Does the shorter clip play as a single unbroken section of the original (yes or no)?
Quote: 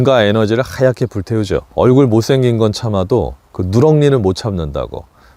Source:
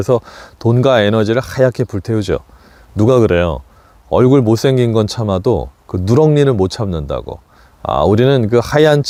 no